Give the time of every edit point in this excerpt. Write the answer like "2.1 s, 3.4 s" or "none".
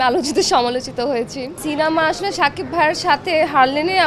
1.6 s